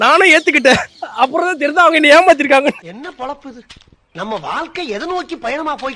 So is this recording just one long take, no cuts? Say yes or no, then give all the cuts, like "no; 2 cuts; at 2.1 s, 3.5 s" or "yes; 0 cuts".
no; 1 cut; at 2.9 s